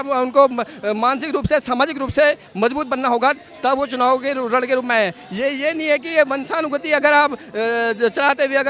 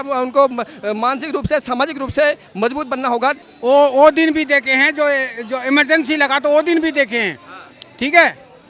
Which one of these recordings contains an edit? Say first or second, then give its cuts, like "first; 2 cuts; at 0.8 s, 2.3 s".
second; 1 cut; at 3.5 s